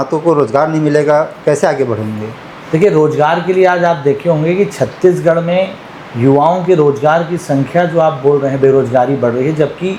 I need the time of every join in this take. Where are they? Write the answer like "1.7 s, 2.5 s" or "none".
none